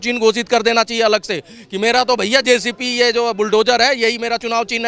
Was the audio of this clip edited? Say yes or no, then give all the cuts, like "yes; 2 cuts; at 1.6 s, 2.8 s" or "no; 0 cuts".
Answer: no; 0 cuts